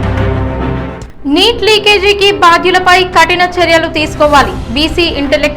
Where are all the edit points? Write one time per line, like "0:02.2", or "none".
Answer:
0:00.9